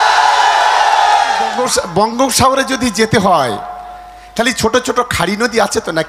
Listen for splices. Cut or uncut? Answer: cut